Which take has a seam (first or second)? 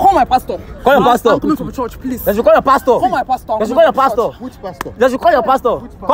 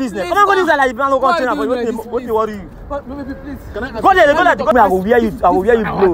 second